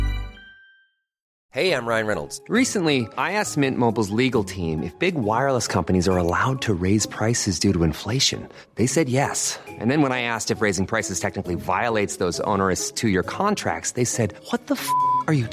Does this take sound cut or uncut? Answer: cut